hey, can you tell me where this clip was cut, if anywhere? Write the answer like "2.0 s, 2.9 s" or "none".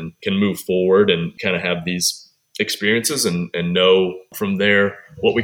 1.4 s, 4.3 s